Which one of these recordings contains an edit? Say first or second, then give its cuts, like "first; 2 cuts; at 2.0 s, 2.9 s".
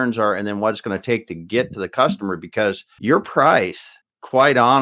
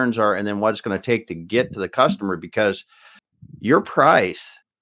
first; 1 cut; at 2.9 s